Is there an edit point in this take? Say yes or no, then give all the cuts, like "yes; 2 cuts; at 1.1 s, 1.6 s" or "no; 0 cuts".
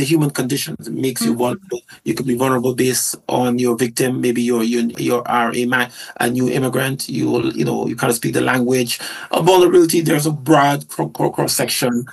no; 0 cuts